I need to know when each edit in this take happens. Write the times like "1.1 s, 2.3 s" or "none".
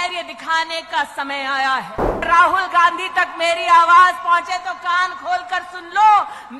2.2 s

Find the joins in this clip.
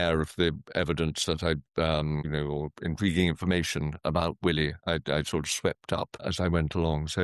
2.3 s, 6.2 s

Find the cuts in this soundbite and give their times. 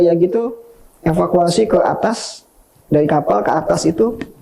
none

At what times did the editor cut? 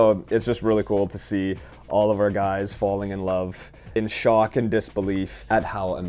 none

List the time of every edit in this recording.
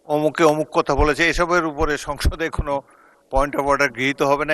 none

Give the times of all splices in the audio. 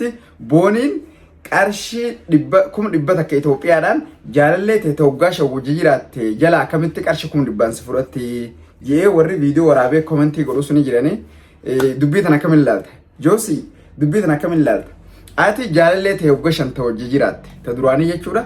none

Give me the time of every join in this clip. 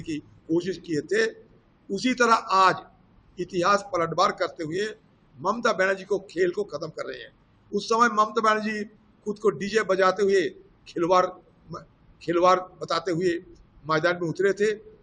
none

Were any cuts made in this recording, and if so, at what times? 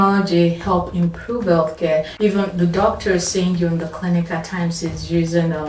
2.1 s

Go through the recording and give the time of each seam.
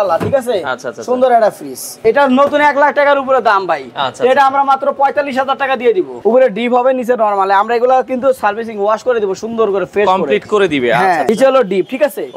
1.9 s, 6.1 s, 11.3 s

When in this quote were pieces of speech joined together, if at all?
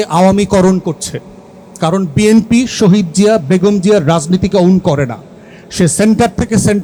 none

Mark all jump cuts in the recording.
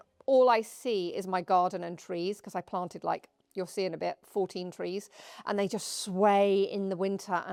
none

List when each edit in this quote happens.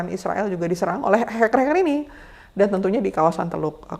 none

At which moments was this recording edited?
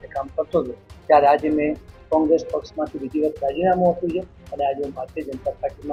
none

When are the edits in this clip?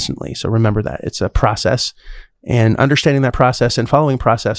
1.0 s

